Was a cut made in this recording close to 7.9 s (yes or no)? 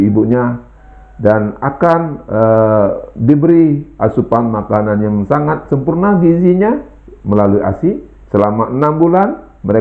no